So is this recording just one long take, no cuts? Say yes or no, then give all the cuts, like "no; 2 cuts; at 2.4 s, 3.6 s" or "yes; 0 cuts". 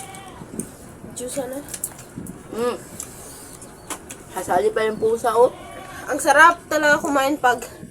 yes; 0 cuts